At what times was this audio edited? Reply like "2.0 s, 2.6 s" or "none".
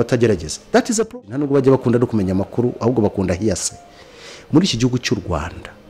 1.1 s